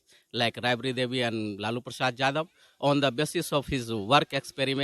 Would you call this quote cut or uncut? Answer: uncut